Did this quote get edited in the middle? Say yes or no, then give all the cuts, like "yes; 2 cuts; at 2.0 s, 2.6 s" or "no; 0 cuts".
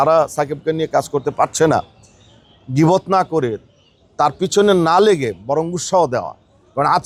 no; 0 cuts